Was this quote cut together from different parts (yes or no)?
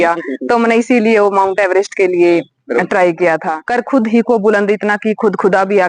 yes